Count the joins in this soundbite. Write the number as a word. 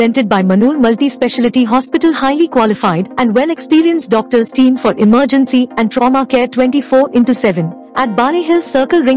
zero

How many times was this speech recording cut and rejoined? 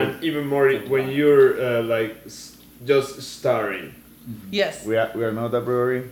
zero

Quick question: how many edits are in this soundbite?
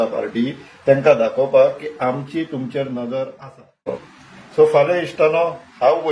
one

